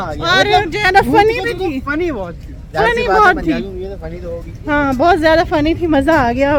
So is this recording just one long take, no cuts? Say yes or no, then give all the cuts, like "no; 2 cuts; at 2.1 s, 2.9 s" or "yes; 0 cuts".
yes; 0 cuts